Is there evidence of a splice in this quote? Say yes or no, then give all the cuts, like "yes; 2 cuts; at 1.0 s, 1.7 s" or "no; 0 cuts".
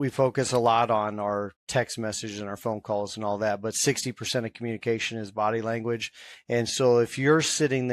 no; 0 cuts